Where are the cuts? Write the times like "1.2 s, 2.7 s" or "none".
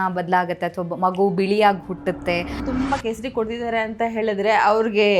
2.6 s